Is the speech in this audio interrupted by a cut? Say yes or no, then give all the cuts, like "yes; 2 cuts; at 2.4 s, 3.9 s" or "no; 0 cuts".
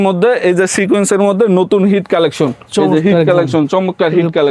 no; 0 cuts